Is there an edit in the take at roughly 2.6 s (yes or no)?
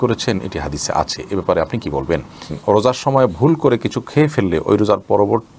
yes